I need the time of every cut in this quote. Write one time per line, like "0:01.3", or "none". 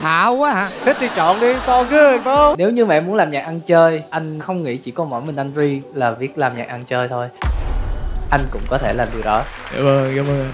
0:02.6